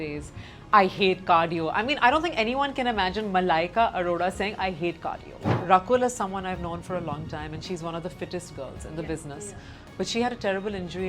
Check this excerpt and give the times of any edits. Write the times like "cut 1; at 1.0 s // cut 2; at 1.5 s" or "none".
cut 1; at 5.6 s